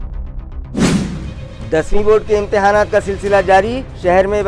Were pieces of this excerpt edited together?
yes; 1 cut; at 1.3 s

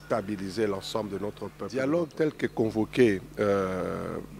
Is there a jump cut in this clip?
yes; 1 cut; at 1.9 s

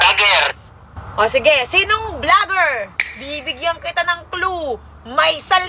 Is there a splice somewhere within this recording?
no; 0 cuts

